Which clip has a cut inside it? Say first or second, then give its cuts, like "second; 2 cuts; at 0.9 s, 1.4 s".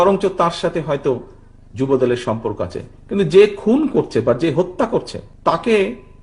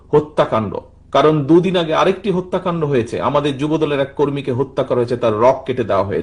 first; 1 cut; at 5.2 s